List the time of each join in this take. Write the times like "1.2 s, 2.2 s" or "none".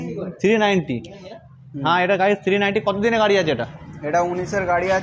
none